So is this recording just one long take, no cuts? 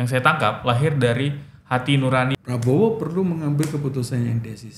no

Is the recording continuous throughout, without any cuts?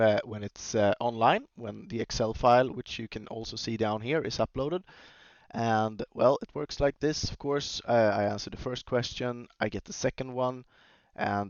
yes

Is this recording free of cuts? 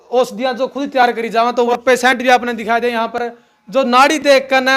no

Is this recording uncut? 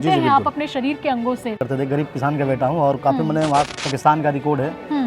no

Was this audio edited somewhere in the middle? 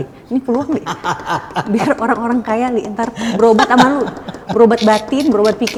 no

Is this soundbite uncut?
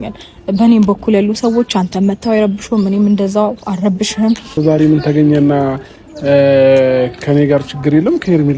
no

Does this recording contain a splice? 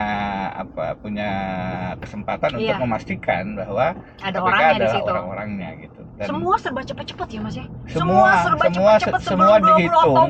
no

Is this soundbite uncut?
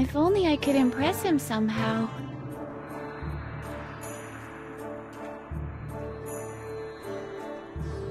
no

